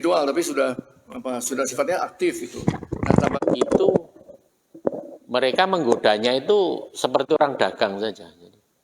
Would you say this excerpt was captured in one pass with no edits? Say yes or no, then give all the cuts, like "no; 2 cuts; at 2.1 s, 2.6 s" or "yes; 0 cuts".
no; 1 cut; at 3.4 s